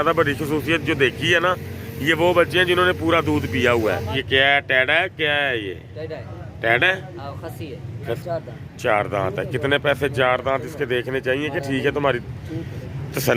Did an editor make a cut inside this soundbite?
yes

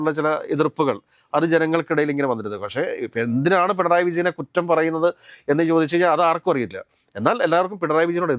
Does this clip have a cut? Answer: no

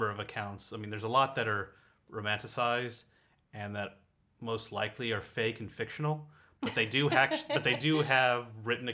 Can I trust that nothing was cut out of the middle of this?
yes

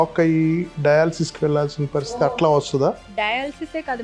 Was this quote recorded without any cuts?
no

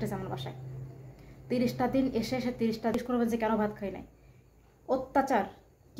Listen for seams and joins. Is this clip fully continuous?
no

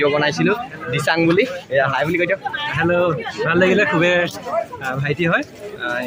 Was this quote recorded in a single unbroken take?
yes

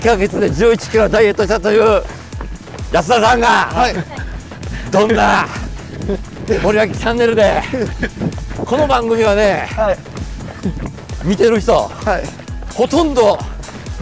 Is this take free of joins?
yes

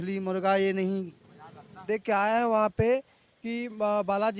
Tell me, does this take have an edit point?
yes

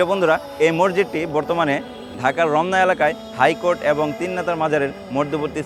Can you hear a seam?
no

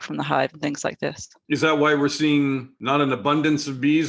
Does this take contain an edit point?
yes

